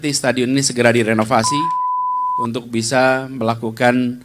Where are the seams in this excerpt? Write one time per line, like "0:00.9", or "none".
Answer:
0:02.1